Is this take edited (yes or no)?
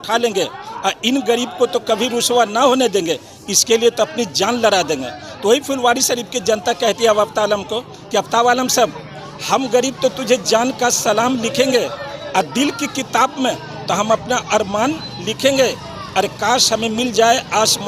no